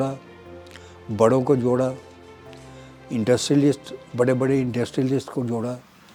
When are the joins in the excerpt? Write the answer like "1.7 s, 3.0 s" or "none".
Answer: none